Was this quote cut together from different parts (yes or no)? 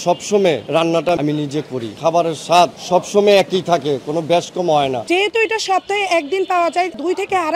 yes